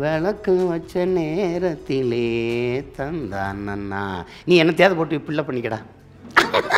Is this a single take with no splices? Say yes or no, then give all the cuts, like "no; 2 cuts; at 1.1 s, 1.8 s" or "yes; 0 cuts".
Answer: yes; 0 cuts